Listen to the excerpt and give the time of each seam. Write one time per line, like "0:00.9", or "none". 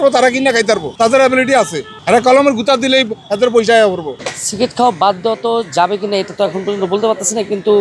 0:04.1